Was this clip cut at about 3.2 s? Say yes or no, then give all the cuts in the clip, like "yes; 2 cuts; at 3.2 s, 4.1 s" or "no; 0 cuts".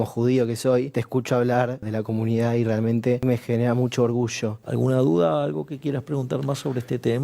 yes; 4 cuts; at 1.0 s, 1.8 s, 3.2 s, 4.6 s